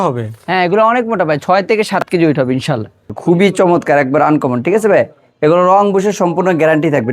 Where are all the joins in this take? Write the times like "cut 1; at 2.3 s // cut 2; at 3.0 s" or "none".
cut 1; at 3.1 s